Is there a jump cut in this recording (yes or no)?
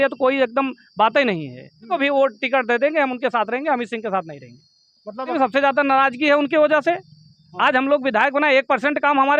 yes